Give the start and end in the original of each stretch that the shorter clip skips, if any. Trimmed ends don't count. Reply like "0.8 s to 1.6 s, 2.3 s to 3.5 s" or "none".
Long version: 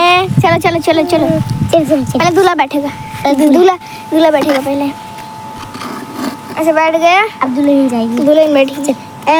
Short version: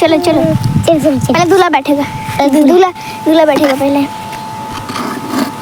none